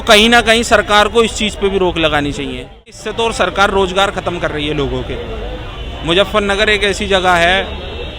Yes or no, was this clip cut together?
yes